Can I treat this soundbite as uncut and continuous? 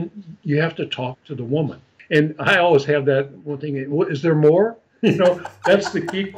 no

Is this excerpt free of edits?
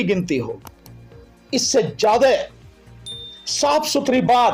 yes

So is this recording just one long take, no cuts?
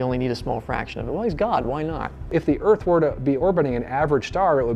no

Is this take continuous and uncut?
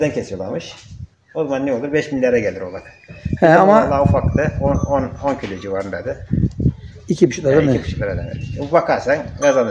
yes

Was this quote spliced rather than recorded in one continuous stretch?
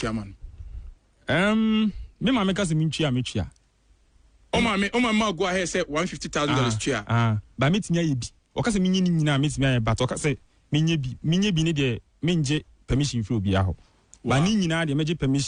no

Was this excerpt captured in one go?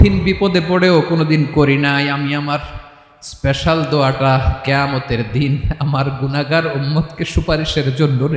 yes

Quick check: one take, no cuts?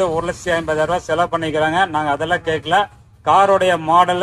yes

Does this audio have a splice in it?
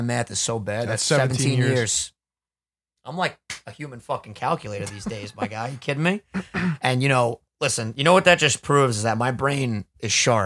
no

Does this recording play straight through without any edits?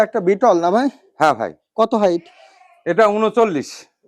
yes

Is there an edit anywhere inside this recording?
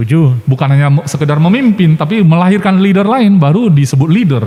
no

